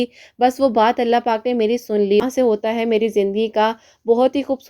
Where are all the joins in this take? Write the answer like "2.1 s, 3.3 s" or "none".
2.2 s